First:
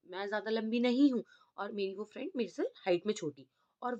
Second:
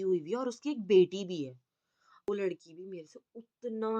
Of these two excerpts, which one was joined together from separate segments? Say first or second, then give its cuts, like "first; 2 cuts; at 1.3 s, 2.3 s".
second; 1 cut; at 2.3 s